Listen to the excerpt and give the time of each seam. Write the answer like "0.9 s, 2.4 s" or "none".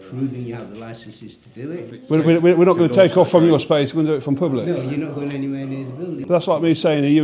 1.9 s, 6.2 s